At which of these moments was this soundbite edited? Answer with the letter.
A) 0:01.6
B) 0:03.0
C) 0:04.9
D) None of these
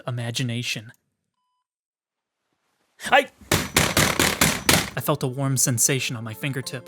C